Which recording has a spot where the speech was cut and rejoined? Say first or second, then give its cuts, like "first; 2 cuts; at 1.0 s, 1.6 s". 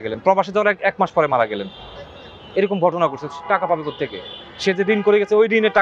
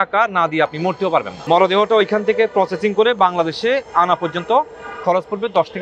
second; 1 cut; at 1.3 s